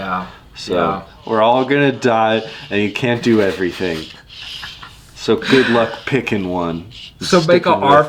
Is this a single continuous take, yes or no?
no